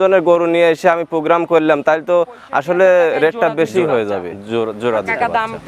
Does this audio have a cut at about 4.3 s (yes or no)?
yes